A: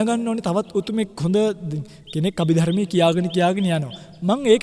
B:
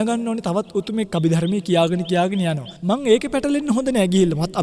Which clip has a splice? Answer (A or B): B